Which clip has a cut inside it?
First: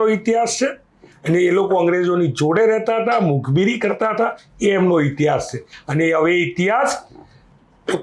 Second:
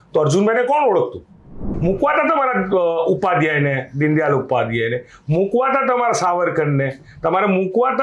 second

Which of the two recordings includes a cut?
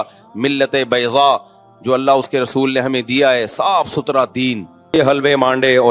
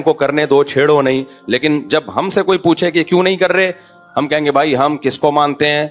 first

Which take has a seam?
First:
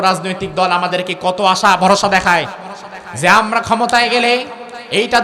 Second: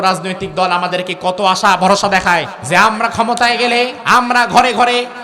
second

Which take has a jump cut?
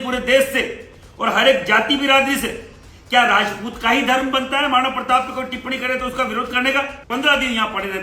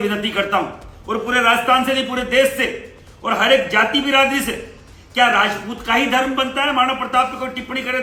first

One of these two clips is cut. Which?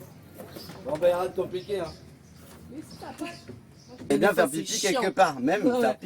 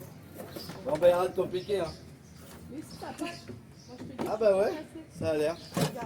first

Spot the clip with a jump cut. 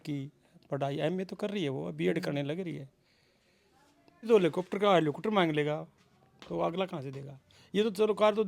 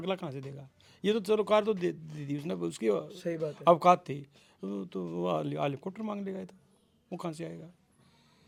first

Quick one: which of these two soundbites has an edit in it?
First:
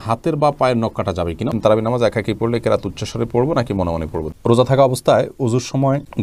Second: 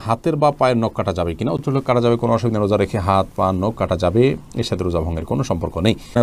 first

